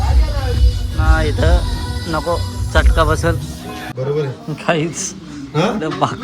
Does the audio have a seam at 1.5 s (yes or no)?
no